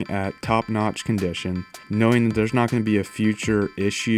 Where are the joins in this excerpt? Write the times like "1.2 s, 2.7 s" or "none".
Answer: 1.8 s